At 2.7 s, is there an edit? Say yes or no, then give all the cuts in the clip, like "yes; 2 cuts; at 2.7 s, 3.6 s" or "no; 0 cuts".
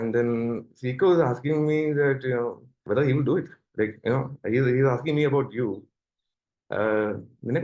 yes; 1 cut; at 2.7 s